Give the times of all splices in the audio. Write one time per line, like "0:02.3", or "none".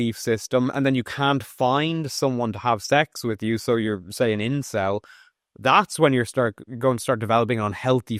none

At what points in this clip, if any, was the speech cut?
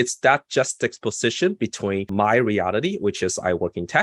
0:02.1

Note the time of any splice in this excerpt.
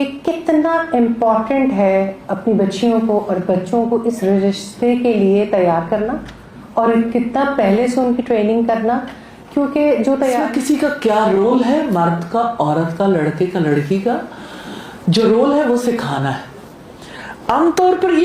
0:10.4

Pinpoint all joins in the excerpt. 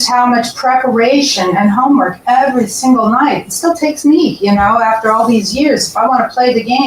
none

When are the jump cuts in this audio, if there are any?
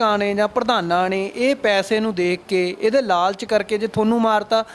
none

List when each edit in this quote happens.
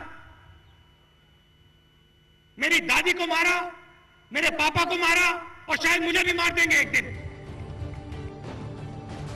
0:07.8

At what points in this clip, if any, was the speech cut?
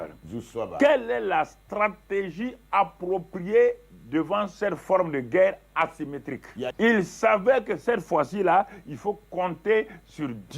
0:06.7

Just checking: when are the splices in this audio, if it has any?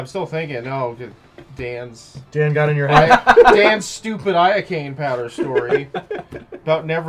none

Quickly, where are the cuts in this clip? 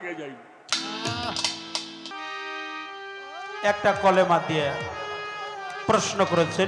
0:02.1

